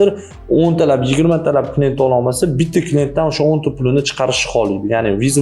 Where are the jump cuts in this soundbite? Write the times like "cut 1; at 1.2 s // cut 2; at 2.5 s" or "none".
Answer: none

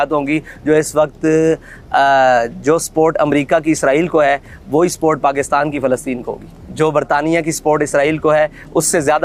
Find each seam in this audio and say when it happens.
none

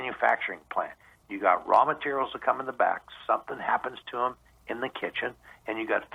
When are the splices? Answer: none

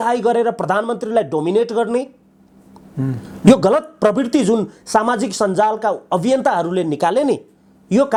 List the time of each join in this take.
none

